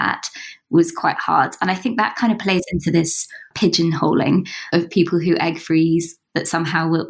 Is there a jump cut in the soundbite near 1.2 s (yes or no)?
no